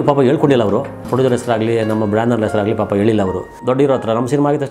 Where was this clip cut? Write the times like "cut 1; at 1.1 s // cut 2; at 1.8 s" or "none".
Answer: cut 1; at 1.0 s // cut 2; at 3.5 s